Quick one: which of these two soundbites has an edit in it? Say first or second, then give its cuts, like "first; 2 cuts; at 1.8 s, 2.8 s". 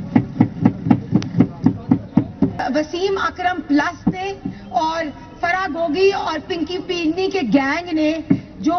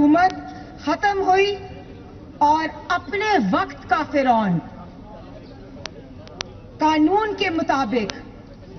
first; 1 cut; at 2.6 s